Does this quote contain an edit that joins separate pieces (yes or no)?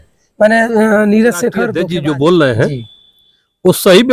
yes